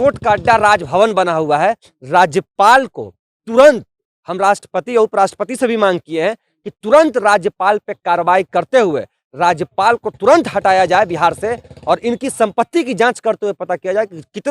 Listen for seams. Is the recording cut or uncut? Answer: uncut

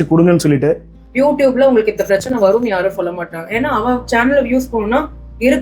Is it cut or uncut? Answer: cut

